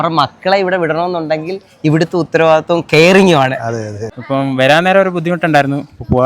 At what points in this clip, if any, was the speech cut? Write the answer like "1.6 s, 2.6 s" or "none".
4.0 s

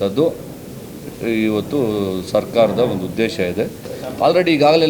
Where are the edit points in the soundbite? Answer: 3.9 s

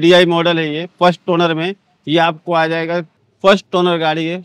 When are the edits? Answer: 3.2 s

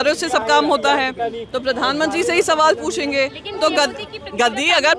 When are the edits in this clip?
none

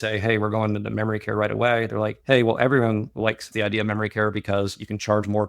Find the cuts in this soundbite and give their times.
3.5 s

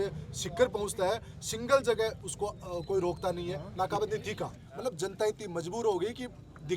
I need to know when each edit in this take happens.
4.6 s

